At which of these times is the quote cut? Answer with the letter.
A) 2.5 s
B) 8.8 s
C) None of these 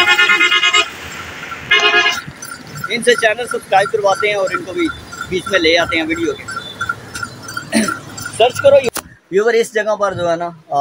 B